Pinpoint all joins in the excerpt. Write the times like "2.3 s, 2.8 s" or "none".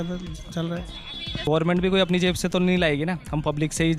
1.5 s